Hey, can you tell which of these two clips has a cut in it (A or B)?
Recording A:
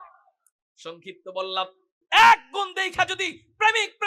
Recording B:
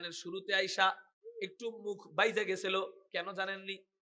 A